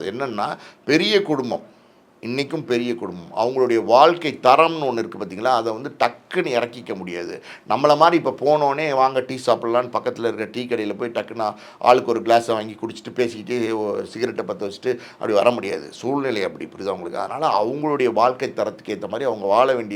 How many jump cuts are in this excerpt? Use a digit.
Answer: 0